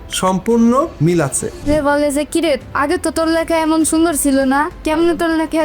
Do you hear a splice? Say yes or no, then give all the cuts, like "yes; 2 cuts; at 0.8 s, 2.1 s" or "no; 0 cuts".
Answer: yes; 1 cut; at 1.7 s